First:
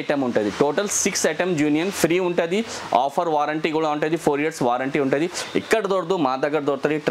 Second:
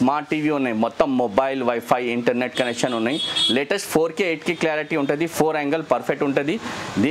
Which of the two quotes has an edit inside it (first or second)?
first